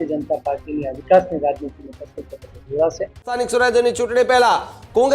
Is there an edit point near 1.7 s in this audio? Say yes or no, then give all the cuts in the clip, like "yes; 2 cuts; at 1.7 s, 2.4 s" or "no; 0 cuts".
no; 1 cut; at 3.3 s